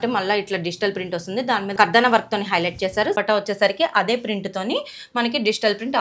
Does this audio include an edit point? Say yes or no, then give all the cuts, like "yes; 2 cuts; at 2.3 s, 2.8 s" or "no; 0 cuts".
yes; 2 cuts; at 1.7 s, 3.1 s